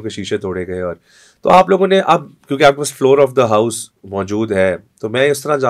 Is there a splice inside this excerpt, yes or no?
no